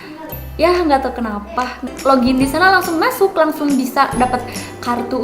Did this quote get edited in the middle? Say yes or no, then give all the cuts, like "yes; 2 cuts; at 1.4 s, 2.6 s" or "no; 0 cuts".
yes; 1 cut; at 1.8 s